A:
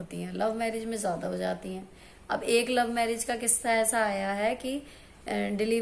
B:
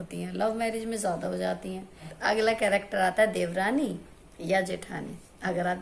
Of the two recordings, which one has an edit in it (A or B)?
B